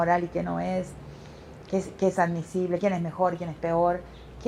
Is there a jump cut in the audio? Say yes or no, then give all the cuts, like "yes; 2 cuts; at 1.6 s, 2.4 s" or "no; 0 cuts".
no; 0 cuts